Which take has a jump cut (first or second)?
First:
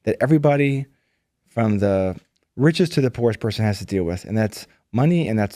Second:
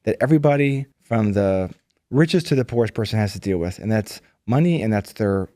second